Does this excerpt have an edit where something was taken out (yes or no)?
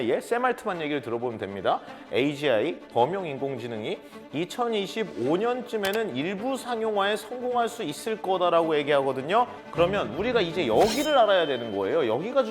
yes